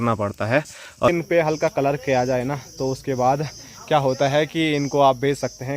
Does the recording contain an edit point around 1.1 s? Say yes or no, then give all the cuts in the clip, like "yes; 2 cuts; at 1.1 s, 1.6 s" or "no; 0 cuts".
yes; 1 cut; at 1.1 s